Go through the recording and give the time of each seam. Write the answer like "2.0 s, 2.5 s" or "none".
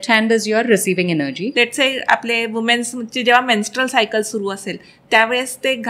1.4 s